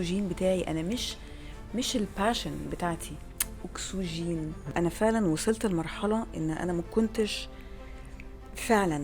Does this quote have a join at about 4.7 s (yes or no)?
yes